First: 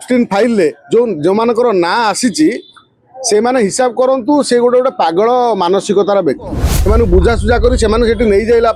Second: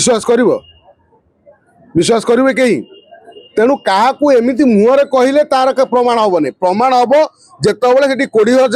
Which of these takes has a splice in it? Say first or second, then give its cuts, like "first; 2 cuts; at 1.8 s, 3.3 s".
first; 1 cut; at 6.7 s